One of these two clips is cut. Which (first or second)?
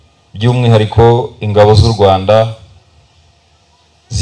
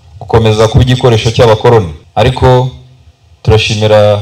second